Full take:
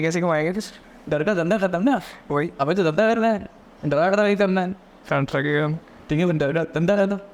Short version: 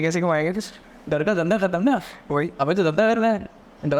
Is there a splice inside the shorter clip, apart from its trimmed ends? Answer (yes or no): no